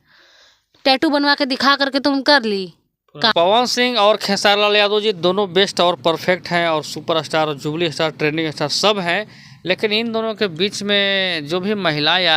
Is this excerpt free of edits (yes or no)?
no